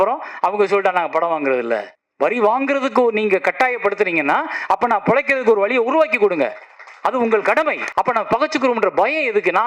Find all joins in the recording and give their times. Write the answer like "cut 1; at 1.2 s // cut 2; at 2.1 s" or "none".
cut 1; at 2.0 s // cut 2; at 7.8 s